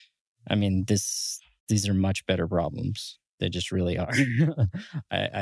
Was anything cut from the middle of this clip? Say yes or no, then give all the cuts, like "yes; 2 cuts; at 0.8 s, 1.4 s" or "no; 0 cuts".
no; 0 cuts